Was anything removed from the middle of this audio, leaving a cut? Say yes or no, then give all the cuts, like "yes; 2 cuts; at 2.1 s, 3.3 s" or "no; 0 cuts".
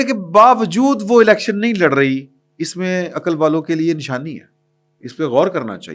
no; 0 cuts